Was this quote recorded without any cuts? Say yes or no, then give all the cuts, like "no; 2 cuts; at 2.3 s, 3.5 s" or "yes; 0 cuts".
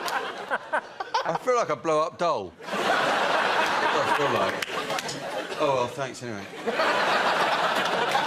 yes; 0 cuts